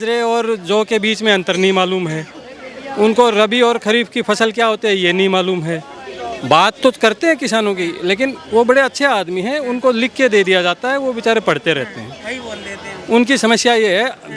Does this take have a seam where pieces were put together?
no; 0 cuts

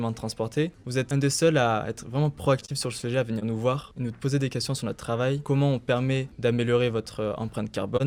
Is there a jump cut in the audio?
yes; 3 cuts; at 0.8 s, 3.9 s, 6.3 s

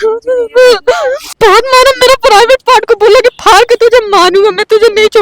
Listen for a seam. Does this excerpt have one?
yes; 1 cut; at 1.2 s

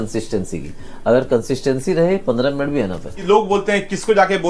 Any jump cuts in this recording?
yes; 1 cut; at 3.1 s

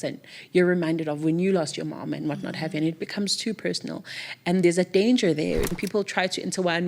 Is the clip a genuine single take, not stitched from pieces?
no; 1 cut; at 5.7 s

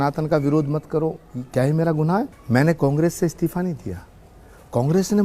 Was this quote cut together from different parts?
yes; 1 cut; at 2.4 s

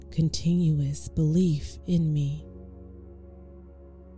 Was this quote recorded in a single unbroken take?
yes; 0 cuts

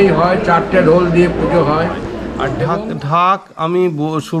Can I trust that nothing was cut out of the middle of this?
no; 1 cut; at 2.6 s

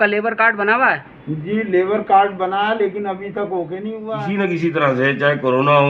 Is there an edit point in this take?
yes; 1 cut; at 4.1 s

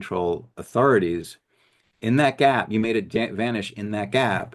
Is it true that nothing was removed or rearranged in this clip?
yes; 0 cuts

